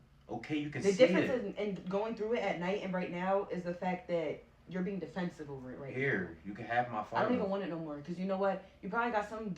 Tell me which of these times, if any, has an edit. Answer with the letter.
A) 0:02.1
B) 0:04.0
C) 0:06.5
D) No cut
B